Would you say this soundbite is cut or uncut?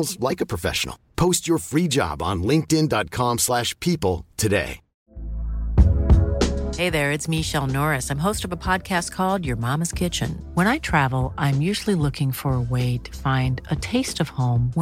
uncut